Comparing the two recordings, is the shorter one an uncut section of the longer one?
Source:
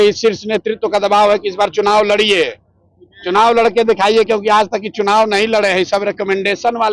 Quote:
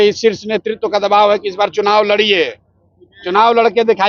yes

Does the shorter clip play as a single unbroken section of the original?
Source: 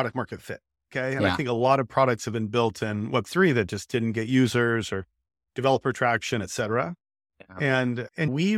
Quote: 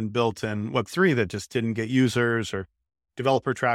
yes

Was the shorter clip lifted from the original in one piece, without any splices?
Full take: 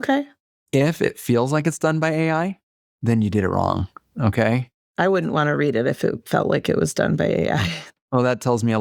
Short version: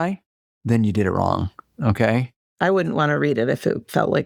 yes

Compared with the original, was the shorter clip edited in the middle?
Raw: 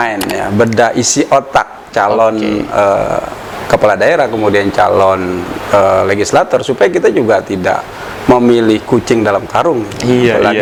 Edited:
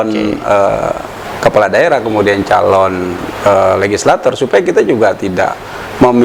no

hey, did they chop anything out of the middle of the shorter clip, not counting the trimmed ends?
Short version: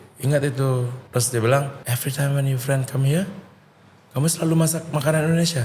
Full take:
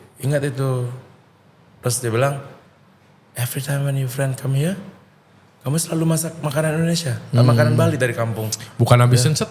yes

